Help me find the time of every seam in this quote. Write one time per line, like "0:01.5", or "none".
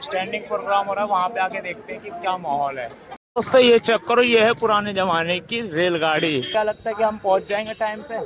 0:03.2
0:06.5